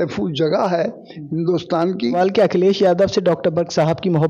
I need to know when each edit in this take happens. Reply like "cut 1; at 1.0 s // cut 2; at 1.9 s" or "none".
cut 1; at 2.2 s